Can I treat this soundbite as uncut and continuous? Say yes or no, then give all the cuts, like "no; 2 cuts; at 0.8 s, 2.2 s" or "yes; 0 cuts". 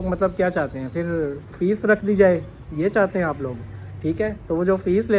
yes; 0 cuts